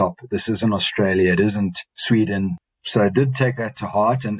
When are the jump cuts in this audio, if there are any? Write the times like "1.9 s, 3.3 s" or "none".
2.6 s